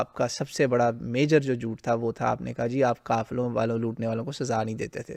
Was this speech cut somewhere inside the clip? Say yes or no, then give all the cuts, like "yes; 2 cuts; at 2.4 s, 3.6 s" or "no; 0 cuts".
no; 0 cuts